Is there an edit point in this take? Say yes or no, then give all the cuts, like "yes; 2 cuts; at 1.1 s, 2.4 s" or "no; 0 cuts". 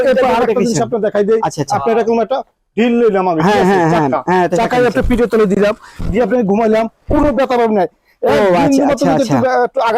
no; 0 cuts